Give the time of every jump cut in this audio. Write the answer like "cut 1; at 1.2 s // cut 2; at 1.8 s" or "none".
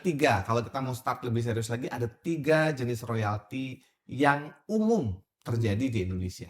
none

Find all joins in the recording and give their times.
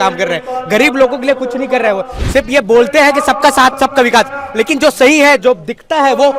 cut 1; at 2.1 s

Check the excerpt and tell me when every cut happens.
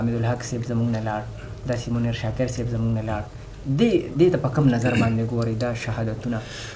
none

